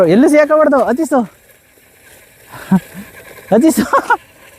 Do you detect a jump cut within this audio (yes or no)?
no